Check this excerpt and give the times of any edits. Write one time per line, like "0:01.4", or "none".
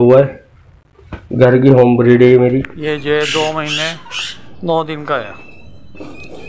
0:02.8

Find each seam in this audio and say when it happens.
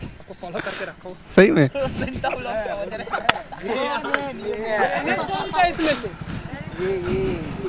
none

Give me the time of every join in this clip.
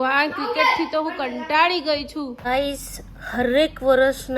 0:02.4

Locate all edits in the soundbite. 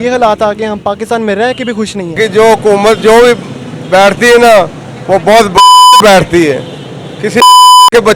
0:02.1

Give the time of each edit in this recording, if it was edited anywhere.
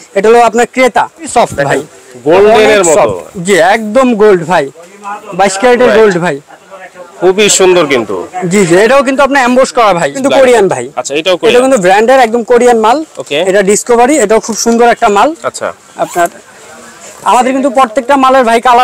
0:01.3
0:10.2

